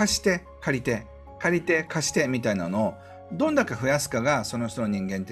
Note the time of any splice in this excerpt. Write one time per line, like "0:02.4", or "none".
none